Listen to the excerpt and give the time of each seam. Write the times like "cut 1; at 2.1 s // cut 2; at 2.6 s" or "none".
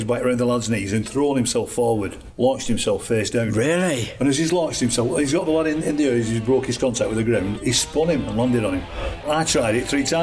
cut 1; at 2.2 s // cut 2; at 9.2 s